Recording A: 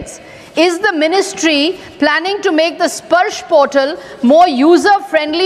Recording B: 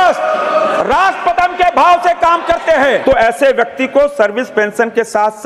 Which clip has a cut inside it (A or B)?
B